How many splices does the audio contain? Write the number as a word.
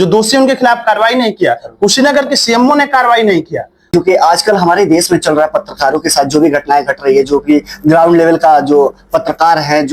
one